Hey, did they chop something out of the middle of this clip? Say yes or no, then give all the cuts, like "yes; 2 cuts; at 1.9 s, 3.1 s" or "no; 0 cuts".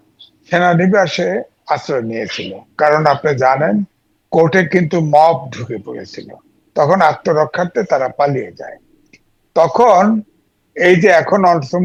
no; 0 cuts